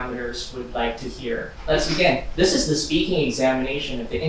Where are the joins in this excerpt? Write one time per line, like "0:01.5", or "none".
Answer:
0:01.5
0:02.3